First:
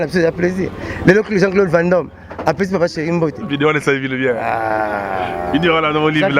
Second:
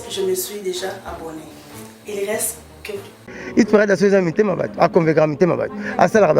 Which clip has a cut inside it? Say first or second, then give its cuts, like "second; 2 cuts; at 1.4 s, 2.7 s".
second; 1 cut; at 3.3 s